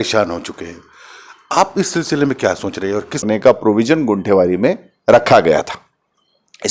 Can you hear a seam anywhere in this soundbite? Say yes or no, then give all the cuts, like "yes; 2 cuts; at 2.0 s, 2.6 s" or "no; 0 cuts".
yes; 1 cut; at 3.2 s